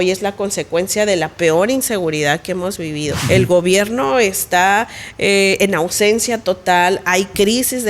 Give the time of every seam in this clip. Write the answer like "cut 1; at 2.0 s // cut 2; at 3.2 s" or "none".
cut 1; at 3.2 s